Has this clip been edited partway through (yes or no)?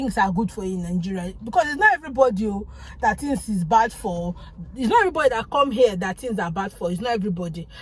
no